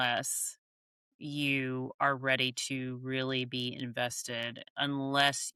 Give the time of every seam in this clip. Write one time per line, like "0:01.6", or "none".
none